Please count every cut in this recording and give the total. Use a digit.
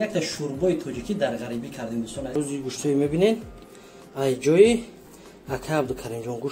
1